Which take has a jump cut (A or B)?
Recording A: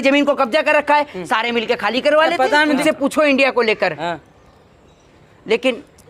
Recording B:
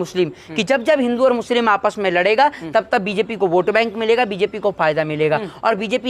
A